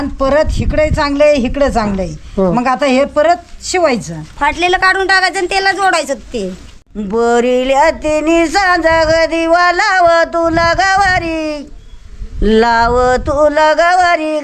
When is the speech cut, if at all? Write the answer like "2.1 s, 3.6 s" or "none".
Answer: 6.6 s